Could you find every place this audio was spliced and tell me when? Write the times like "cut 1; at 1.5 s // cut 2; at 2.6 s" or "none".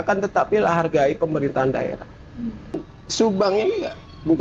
cut 1; at 2.8 s